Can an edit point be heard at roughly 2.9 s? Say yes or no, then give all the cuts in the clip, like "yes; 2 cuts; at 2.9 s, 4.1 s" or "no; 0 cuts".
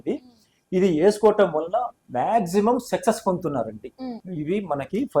no; 1 cut; at 4.3 s